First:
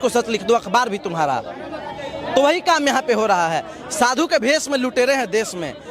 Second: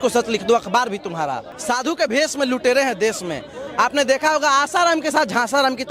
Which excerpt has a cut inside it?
second; 1 cut; at 1.5 s

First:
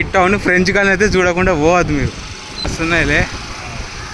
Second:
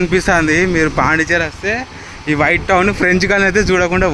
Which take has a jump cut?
first; 1 cut; at 2.7 s

